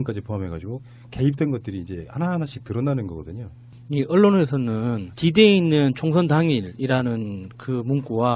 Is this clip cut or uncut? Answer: cut